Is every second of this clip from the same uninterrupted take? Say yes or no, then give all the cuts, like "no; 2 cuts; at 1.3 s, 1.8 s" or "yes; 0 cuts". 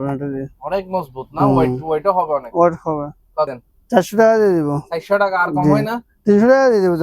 no; 1 cut; at 3.5 s